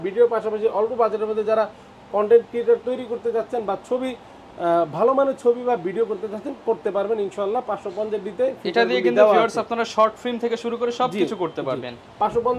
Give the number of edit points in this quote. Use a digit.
0